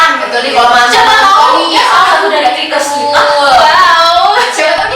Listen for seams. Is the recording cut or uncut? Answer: uncut